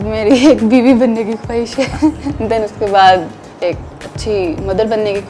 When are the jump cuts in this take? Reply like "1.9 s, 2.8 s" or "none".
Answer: none